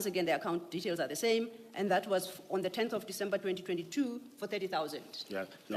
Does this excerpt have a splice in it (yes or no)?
no